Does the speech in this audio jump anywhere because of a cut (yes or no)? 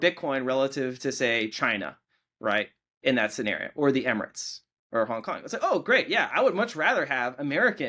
no